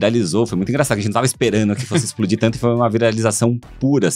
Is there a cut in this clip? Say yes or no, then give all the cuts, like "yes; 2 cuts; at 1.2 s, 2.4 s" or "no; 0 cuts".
no; 0 cuts